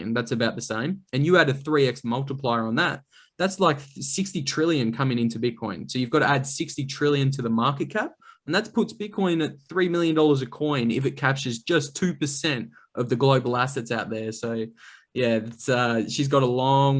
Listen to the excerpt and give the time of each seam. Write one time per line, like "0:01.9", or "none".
none